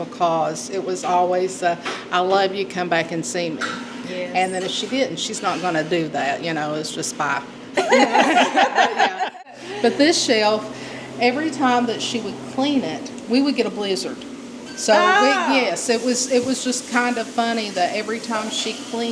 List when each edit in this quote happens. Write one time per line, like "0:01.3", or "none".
0:09.4